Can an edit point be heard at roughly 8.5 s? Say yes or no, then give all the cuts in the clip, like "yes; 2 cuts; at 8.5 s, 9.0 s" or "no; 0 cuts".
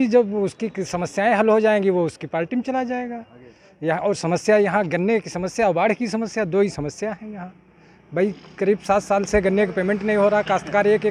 no; 0 cuts